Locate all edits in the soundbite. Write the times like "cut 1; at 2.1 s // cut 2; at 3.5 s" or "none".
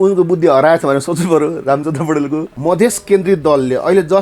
cut 1; at 2.5 s